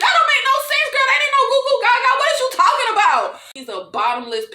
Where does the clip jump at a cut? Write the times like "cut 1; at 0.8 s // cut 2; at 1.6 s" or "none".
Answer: cut 1; at 3.6 s